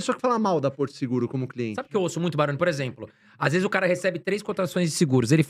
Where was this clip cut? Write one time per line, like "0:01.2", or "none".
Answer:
0:01.8